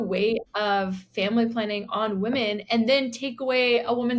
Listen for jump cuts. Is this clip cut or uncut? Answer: uncut